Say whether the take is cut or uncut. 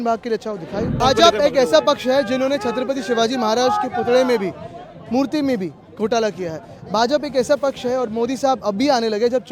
cut